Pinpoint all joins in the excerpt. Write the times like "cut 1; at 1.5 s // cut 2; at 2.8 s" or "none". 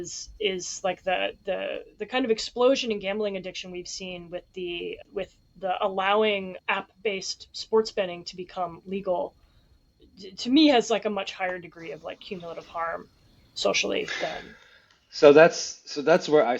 cut 1; at 5.0 s // cut 2; at 6.5 s